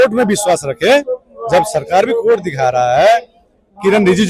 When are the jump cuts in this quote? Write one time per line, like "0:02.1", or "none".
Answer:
none